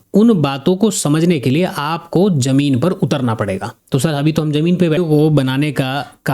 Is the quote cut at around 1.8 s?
no; 1 cut; at 5.0 s

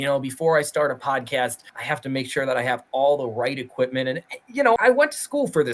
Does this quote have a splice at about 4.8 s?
yes; 2 cuts; at 1.7 s, 4.8 s

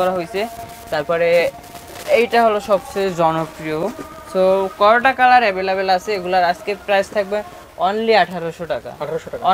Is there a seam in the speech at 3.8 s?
no; 0 cuts

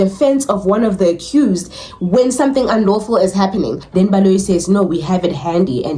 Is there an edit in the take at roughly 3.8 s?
yes; 1 cut; at 3.8 s

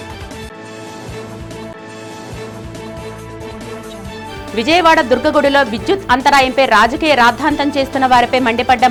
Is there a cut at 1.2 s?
no; 0 cuts

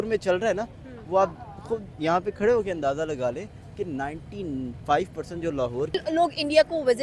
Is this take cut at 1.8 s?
no; 1 cut; at 5.9 s

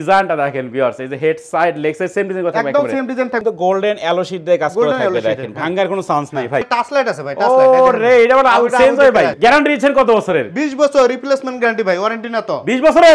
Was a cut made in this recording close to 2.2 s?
no; 3 cuts; at 3.4 s, 6.7 s, 9.3 s

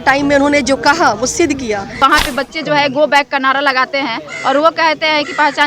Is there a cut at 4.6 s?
no; 1 cut; at 2.0 s

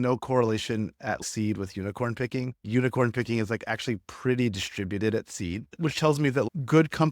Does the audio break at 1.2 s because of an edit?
yes; 2 cuts; at 1.2 s, 2.6 s

